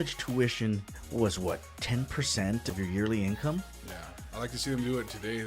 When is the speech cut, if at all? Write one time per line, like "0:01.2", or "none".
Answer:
0:01.0
0:02.7